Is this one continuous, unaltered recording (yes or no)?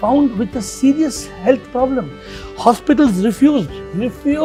yes